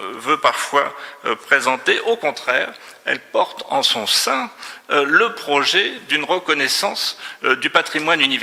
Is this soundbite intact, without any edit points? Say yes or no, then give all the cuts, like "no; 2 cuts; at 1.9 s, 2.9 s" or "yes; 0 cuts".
yes; 0 cuts